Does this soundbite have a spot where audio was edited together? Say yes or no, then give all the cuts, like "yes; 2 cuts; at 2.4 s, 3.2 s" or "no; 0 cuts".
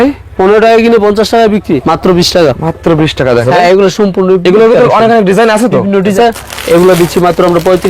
yes; 3 cuts; at 1.8 s, 3.5 s, 6.1 s